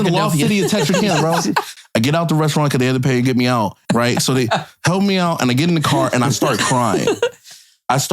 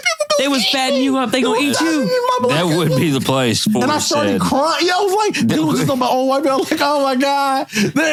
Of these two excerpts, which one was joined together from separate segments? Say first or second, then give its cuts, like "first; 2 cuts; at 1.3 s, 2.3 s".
first; 2 cuts; at 1.8 s, 3.8 s